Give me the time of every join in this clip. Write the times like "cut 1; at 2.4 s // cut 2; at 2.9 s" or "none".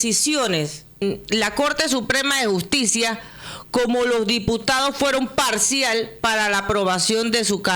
cut 1; at 1.0 s